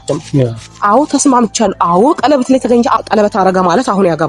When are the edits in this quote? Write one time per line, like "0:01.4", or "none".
0:03.0